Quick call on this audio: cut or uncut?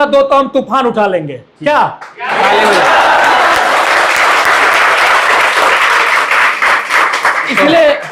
uncut